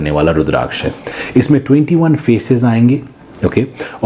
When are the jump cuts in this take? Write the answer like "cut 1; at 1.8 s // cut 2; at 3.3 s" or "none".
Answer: none